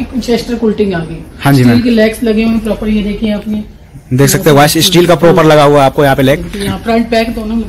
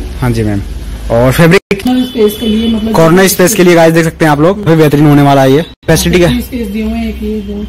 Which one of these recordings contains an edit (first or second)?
second